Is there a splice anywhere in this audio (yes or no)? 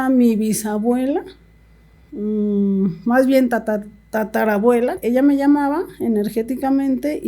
yes